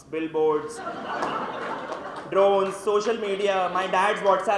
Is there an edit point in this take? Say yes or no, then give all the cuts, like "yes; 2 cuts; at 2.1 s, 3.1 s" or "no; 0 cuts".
no; 0 cuts